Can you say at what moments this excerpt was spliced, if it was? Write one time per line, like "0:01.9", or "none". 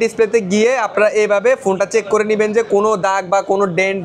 none